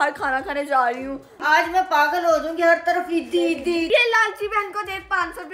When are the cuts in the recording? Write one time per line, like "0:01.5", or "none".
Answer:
0:01.4
0:03.9